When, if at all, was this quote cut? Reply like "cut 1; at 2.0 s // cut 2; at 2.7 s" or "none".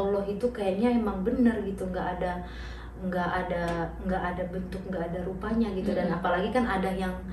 none